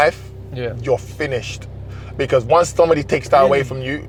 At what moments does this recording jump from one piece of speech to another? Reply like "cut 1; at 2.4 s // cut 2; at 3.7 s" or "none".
none